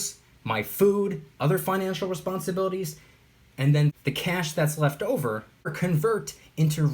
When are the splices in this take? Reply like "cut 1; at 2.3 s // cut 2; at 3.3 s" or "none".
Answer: cut 1; at 4.0 s // cut 2; at 5.7 s